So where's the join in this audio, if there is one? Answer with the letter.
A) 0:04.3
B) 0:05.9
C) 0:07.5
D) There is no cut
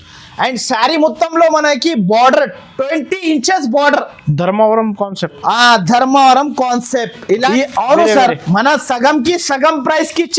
C